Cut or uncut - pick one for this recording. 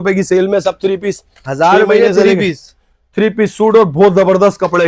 uncut